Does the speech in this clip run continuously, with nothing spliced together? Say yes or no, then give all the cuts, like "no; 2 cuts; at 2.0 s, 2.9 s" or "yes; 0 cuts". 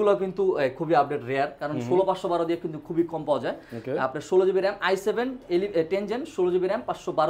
yes; 0 cuts